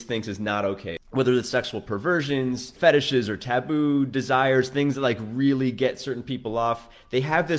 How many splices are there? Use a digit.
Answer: 2